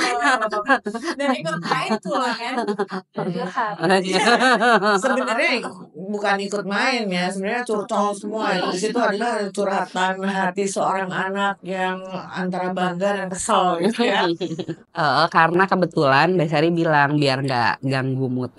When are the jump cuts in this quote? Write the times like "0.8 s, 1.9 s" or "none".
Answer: 14.8 s